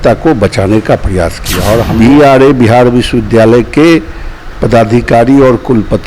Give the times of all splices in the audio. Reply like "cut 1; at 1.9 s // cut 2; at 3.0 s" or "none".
cut 1; at 1.9 s